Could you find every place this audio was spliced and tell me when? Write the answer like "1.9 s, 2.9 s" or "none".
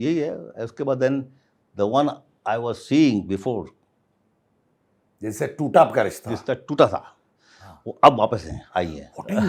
none